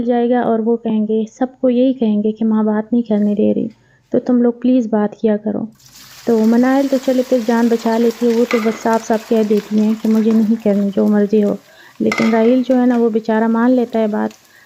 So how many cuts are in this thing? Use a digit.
0